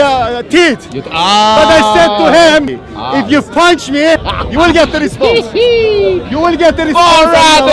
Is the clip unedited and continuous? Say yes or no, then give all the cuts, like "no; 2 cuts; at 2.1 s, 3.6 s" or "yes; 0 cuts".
no; 2 cuts; at 2.7 s, 4.3 s